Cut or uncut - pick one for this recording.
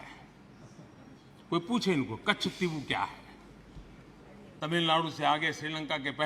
cut